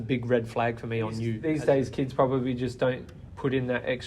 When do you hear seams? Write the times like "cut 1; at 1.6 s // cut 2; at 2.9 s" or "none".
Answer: cut 1; at 1.3 s

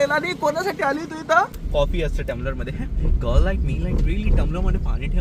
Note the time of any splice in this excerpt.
cut 1; at 1.6 s

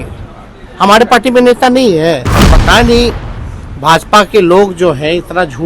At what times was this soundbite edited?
cut 1; at 2.3 s

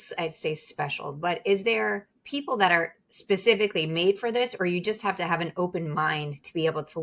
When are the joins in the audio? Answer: none

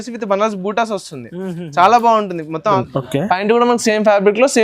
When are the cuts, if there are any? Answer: cut 1; at 2.8 s

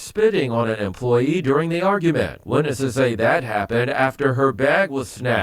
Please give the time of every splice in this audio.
cut 1; at 1.2 s // cut 2; at 3.2 s

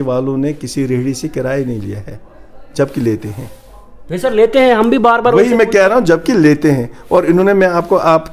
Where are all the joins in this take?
none

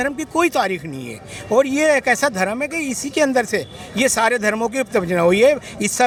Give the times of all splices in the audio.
none

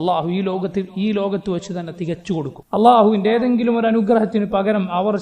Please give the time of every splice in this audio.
cut 1; at 2.6 s

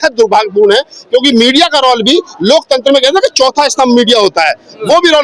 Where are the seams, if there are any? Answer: none

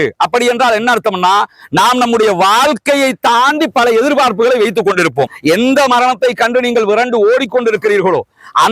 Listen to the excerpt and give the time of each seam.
cut 1; at 5.3 s

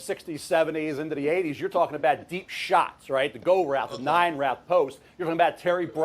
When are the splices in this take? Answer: cut 1; at 4.7 s

